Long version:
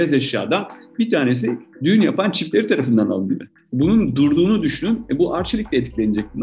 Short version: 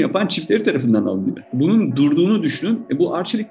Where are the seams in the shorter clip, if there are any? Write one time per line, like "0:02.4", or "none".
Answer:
0:01.4